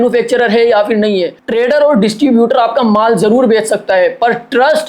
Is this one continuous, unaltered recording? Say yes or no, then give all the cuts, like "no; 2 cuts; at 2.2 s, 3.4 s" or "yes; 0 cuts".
no; 1 cut; at 1.4 s